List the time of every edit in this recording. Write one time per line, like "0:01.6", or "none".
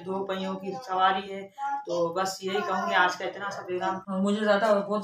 0:04.1

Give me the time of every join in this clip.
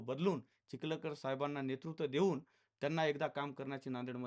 none

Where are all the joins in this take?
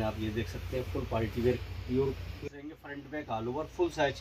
0:02.3

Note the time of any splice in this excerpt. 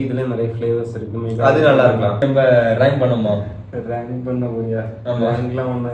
0:02.2

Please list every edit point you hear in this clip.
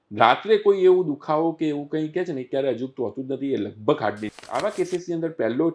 0:04.3

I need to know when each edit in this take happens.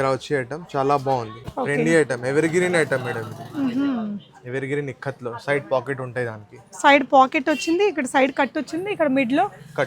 0:01.4

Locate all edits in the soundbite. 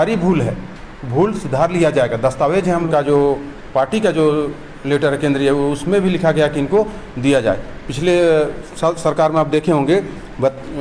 0:02.9

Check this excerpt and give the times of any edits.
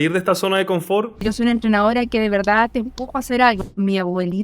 0:01.2
0:03.6

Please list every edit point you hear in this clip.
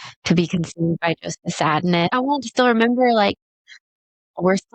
0:02.1

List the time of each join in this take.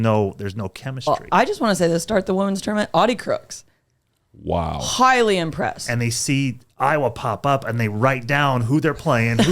0:01.1
0:05.8

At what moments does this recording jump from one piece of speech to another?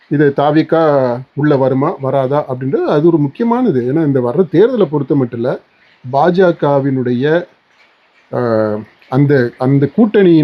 none

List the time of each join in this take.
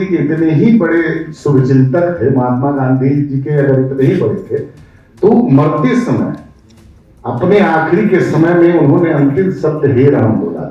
none

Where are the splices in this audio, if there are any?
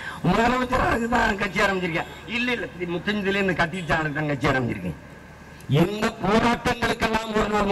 none

